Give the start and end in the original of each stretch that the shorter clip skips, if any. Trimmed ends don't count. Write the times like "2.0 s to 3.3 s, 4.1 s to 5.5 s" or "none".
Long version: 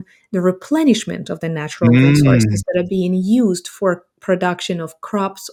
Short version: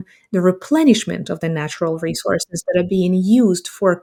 none